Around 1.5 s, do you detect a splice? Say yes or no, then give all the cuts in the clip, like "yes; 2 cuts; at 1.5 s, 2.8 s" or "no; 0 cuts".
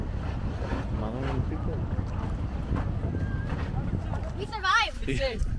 no; 1 cut; at 4.3 s